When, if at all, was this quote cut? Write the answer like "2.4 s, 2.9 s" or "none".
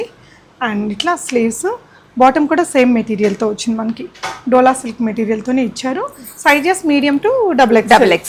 none